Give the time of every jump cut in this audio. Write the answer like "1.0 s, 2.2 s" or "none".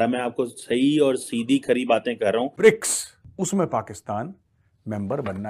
2.5 s